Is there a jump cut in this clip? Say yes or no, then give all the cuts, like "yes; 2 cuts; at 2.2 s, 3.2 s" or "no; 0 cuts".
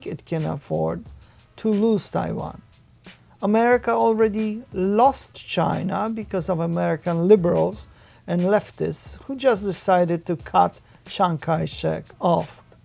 no; 0 cuts